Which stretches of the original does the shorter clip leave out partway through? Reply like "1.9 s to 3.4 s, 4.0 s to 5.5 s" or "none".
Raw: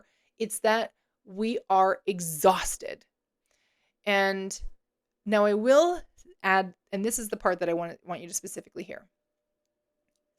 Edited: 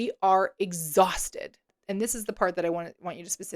3.2 s to 6.8 s

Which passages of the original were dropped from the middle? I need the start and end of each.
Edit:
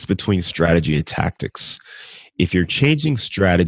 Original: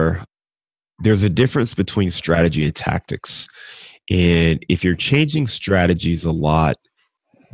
4.0 s to 4.6 s

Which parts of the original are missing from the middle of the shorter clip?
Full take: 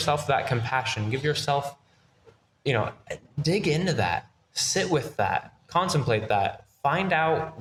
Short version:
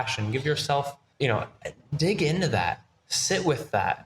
1.8 s to 2.5 s

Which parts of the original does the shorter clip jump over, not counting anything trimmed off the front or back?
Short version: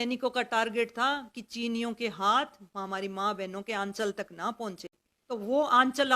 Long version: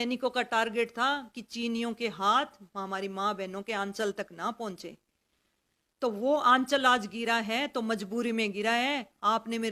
5.1 s to 5.8 s

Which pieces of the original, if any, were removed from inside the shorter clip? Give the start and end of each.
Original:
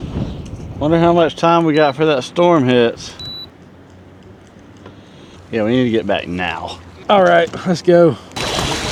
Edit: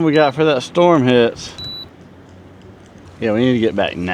4.7 s to 5.4 s

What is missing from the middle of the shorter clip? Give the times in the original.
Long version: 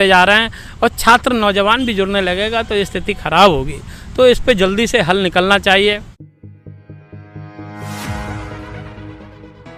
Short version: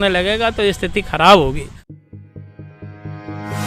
4.0 s to 6.1 s

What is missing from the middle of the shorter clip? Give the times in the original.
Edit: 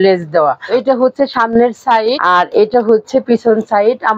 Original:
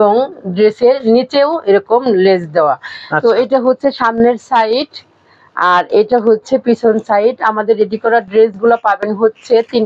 2.9 s to 3.4 s, 4.8 s to 5.6 s

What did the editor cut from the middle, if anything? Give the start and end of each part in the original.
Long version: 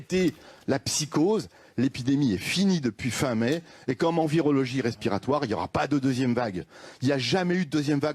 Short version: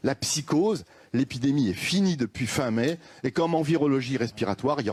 none

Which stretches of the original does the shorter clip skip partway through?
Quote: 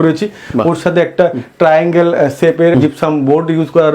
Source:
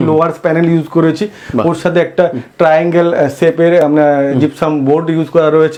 3.7 s to 4.3 s

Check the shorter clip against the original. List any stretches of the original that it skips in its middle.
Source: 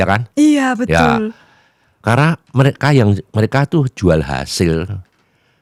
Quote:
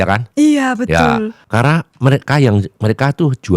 1.4 s to 1.9 s

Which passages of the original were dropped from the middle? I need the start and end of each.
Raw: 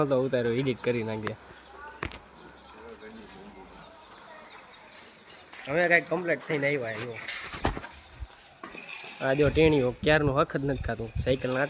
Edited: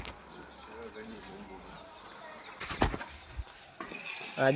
4.6 s to 7.4 s

